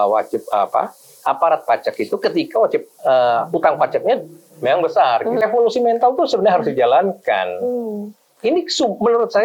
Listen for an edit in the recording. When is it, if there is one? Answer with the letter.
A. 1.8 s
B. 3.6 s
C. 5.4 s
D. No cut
C